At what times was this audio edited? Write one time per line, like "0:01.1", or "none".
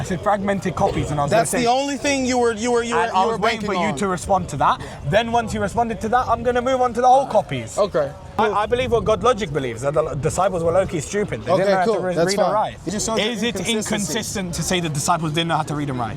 0:08.4
0:12.9